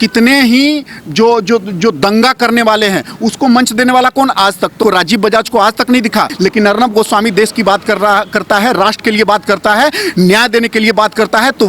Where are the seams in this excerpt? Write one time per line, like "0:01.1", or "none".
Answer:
0:04.8
0:06.3